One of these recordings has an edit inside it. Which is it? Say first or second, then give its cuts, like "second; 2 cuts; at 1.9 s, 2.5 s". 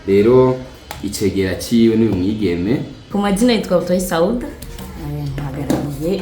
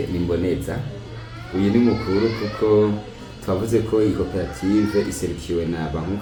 first; 1 cut; at 3.0 s